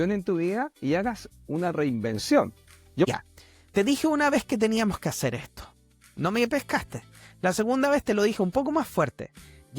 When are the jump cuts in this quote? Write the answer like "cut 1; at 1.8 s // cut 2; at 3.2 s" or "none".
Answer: cut 1; at 3.1 s